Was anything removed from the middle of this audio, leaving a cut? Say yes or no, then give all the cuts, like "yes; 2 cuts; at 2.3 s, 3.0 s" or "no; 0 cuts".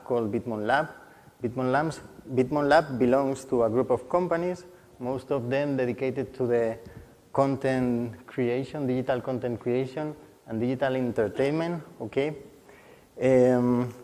yes; 1 cut; at 6.5 s